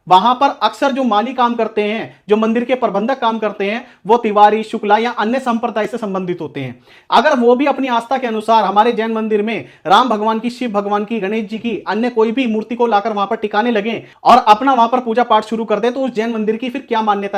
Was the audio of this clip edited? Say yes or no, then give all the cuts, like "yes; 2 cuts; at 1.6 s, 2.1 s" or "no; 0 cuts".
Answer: no; 0 cuts